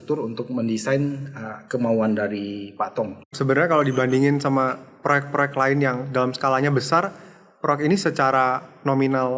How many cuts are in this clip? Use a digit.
1